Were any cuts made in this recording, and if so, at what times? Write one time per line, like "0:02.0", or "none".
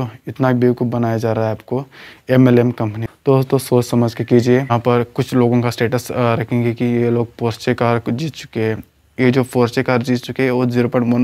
0:03.1
0:04.7